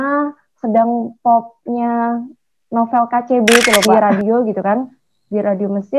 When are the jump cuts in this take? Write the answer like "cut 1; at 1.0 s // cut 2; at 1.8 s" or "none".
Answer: cut 1; at 4.0 s